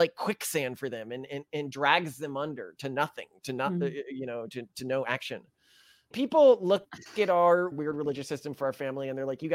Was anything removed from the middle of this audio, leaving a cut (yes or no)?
yes